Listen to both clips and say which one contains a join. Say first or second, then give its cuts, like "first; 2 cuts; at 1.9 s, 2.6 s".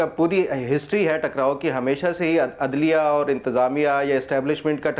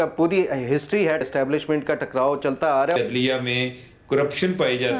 second; 2 cuts; at 1.2 s, 3.0 s